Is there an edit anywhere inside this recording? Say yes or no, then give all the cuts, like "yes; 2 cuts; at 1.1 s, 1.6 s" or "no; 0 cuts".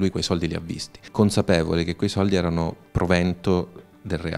yes; 1 cut; at 1.0 s